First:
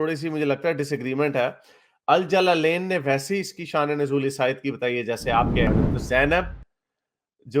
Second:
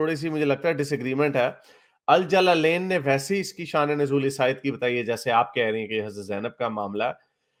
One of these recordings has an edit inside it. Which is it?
first; 1 cut; at 5.7 s

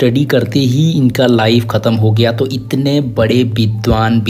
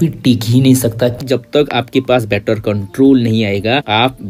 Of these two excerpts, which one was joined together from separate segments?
second; 1 cut; at 1.2 s

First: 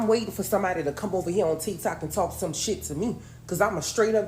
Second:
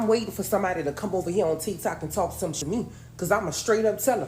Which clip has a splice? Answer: second; 1 cut; at 2.6 s

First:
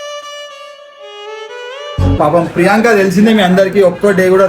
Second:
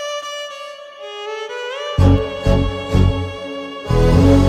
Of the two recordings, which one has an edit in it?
first; 1 cut; at 2.2 s

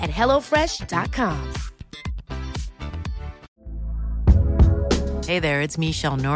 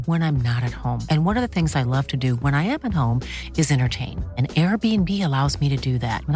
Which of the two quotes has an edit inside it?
first; 1 cut; at 3.5 s

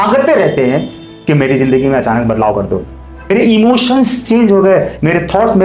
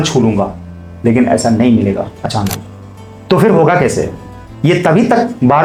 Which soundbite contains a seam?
first; 1 cut; at 3.2 s

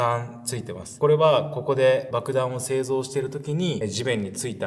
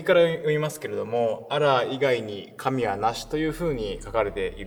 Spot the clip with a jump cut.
first; 3 cuts; at 1.0 s, 2.1 s, 3.8 s

